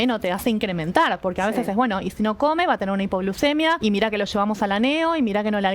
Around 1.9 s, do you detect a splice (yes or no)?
no